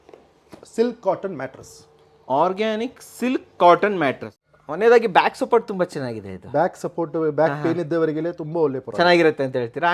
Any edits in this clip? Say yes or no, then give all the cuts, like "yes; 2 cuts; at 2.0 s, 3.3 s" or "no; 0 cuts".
yes; 1 cut; at 4.3 s